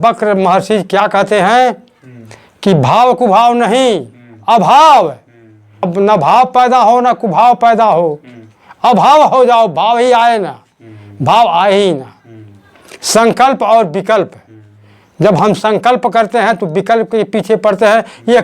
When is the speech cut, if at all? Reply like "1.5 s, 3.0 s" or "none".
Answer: 5.9 s